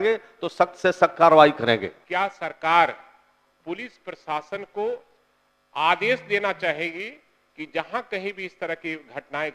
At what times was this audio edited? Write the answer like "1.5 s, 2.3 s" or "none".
2.0 s